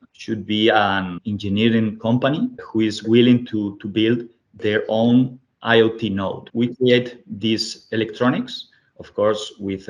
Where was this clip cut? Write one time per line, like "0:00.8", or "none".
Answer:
0:01.2
0:02.6
0:06.5